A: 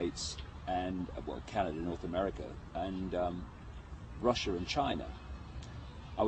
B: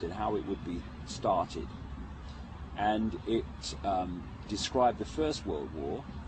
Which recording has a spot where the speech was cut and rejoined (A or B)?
B